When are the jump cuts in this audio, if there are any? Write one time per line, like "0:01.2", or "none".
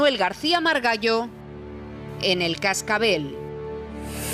0:03.3